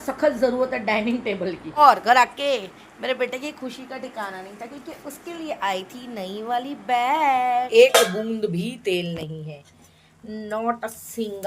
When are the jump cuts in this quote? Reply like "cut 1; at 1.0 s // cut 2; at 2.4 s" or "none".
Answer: cut 1; at 1.8 s // cut 2; at 7.7 s